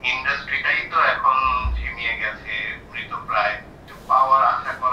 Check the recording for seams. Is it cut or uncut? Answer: cut